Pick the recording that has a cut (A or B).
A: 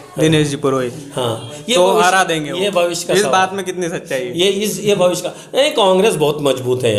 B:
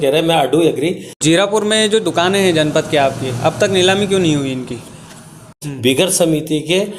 B